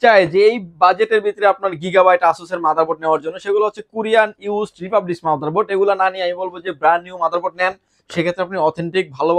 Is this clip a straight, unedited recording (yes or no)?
yes